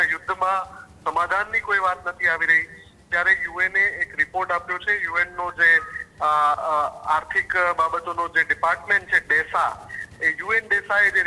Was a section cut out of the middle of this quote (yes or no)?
no